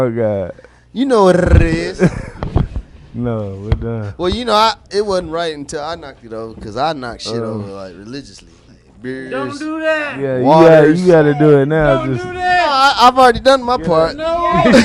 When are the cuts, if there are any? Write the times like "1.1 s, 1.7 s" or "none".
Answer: none